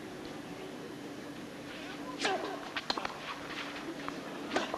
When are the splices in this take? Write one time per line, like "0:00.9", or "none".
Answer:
0:03.0